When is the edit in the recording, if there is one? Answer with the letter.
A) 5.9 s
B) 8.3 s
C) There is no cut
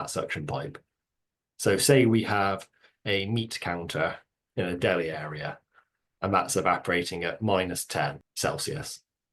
B